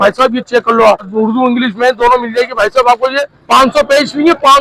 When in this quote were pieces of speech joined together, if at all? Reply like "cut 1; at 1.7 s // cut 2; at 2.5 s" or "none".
cut 1; at 1.1 s // cut 2; at 3.3 s